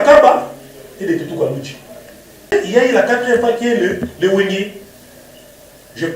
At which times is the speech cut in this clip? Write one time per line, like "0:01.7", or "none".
0:02.5